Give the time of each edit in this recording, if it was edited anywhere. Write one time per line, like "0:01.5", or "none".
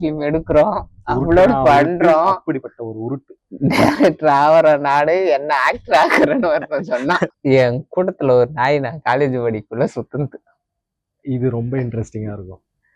0:07.4